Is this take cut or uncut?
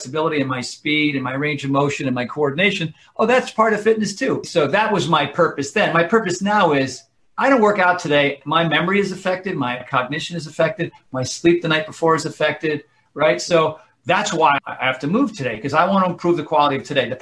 cut